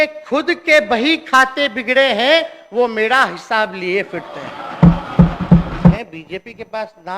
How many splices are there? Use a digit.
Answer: 1